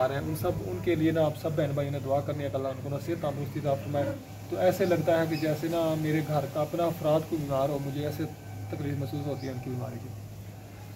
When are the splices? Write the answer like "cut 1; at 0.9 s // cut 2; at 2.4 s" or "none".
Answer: cut 1; at 2.7 s // cut 2; at 4.2 s